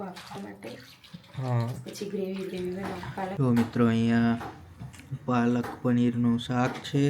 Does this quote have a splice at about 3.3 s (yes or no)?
yes